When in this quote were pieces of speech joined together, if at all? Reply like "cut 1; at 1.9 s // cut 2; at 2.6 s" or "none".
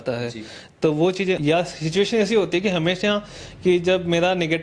cut 1; at 1.4 s